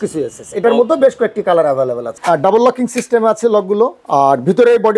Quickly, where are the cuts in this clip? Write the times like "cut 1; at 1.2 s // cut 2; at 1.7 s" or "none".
cut 1; at 2.2 s // cut 2; at 4.0 s